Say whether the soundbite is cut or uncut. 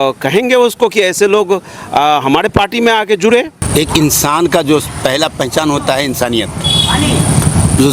cut